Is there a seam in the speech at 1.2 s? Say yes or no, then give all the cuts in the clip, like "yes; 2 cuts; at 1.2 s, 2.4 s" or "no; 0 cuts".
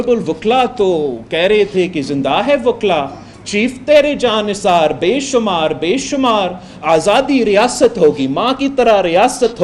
no; 0 cuts